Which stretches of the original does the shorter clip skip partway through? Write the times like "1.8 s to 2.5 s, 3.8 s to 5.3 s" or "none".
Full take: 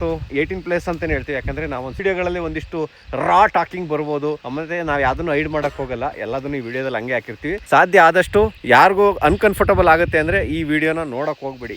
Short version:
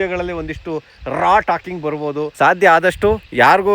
4.4 s to 7.6 s